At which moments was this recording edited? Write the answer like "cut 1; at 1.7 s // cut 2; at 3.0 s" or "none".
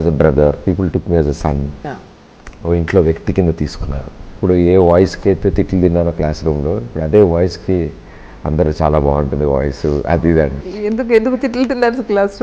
cut 1; at 4.4 s // cut 2; at 10.6 s